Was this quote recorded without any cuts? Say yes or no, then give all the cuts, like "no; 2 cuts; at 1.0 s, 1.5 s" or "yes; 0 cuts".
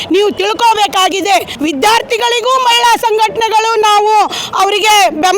no; 1 cut; at 1.5 s